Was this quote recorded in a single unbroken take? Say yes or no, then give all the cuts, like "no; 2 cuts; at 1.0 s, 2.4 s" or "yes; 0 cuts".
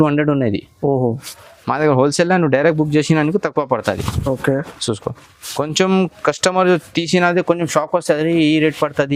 yes; 0 cuts